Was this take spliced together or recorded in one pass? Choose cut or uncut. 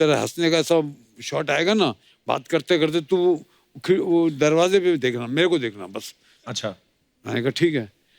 uncut